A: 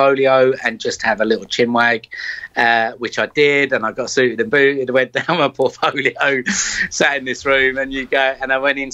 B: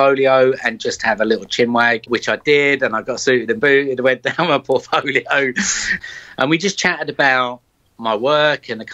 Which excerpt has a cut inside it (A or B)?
B